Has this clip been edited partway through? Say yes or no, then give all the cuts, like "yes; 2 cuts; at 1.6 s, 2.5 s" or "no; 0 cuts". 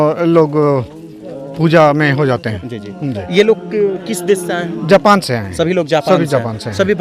no; 0 cuts